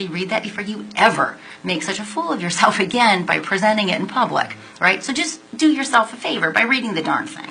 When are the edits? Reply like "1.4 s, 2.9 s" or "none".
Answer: none